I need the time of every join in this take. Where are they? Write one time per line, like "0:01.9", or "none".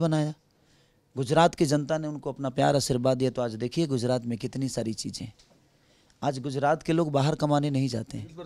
none

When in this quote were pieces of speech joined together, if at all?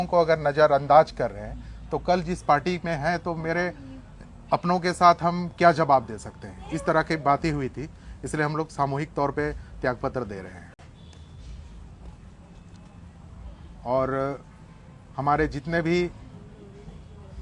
none

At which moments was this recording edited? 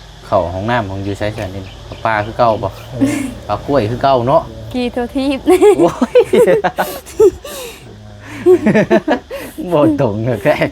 none

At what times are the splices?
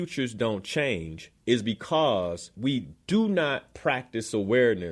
0:02.7

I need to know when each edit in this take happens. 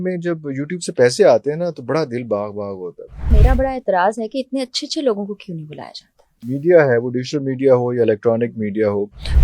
0:03.4
0:06.5

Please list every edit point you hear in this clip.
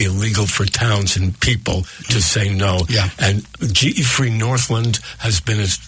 0:03.2

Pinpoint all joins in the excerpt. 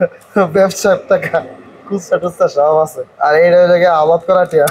0:03.0

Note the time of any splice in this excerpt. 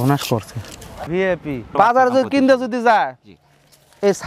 0:01.2

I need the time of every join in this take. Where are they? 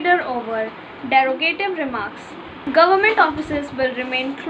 0:02.4

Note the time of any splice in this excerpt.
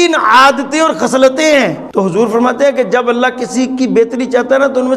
0:01.8

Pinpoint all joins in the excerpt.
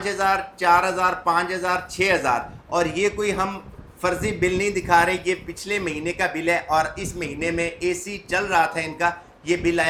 none

